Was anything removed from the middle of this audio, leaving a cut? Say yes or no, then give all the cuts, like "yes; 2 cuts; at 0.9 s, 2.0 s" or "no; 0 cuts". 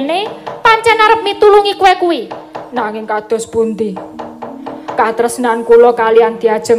yes; 1 cut; at 1.7 s